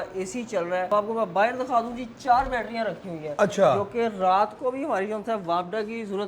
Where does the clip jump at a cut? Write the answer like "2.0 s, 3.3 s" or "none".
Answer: 0.9 s